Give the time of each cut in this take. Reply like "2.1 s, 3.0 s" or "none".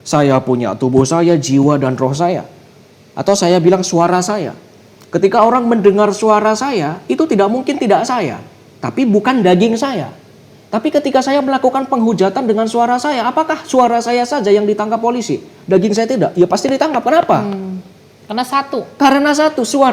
none